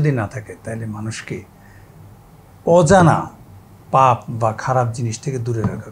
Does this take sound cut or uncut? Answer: uncut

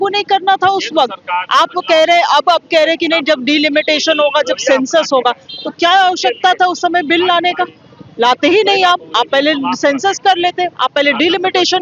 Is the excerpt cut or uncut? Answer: uncut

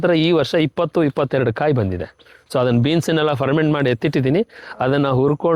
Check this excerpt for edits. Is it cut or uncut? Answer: uncut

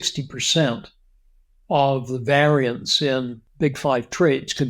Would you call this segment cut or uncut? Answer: cut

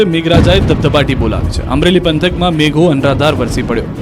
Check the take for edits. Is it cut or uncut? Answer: cut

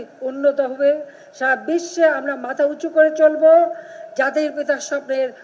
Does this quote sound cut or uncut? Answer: uncut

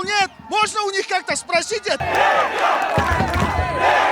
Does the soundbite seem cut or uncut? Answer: cut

